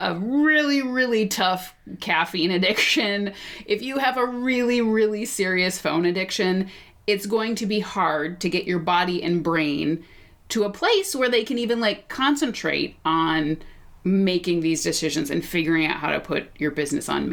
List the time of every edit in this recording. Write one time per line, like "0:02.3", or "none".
none